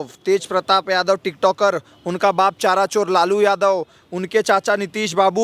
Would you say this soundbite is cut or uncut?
uncut